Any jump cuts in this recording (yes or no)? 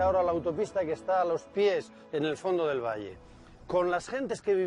no